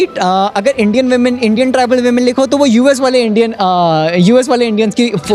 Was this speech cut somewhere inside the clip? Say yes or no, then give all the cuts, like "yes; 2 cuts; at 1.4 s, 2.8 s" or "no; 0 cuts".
no; 0 cuts